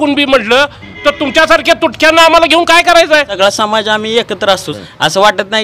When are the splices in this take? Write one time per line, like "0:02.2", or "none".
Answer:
0:03.3
0:04.7